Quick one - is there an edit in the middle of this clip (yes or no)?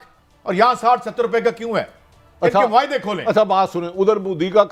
no